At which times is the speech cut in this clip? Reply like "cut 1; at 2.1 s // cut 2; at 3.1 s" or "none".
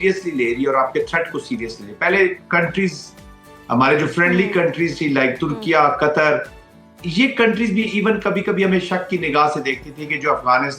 none